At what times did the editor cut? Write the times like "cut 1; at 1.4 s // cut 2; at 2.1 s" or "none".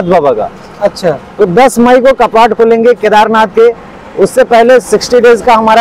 none